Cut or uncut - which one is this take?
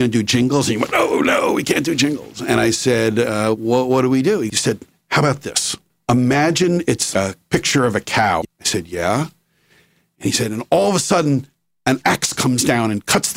cut